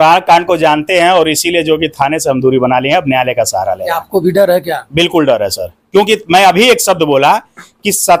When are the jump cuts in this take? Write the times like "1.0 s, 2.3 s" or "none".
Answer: none